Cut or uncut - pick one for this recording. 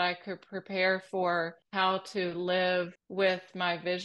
cut